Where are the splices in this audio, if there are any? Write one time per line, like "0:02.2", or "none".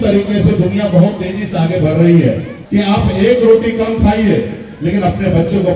0:02.5